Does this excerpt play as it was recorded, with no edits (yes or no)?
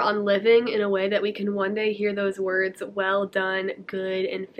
yes